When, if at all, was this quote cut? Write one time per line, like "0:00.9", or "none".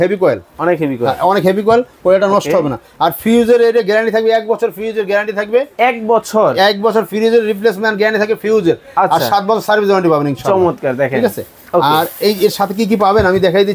none